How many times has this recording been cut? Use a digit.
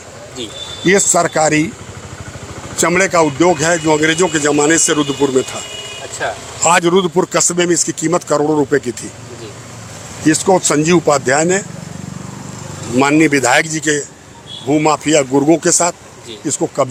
0